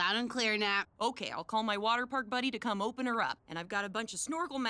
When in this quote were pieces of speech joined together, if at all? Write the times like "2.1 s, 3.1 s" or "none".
none